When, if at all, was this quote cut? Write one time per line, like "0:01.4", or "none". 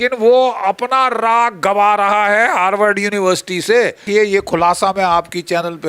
0:04.0